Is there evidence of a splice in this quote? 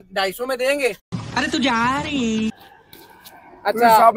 yes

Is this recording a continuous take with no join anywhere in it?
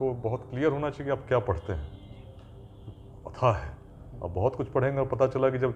yes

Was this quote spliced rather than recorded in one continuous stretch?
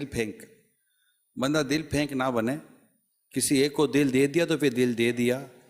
no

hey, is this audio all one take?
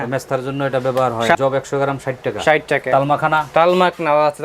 no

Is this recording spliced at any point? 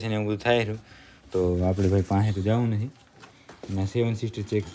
no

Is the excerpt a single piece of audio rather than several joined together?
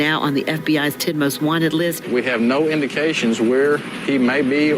no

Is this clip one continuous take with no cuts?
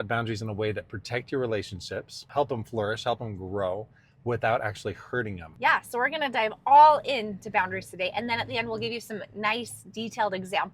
no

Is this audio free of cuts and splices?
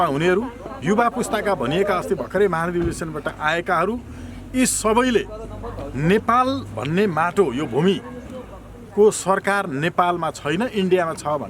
yes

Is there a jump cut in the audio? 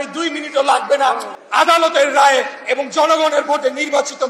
yes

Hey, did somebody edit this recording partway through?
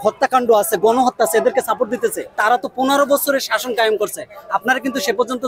yes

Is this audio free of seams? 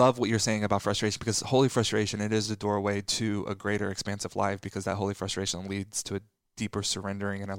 yes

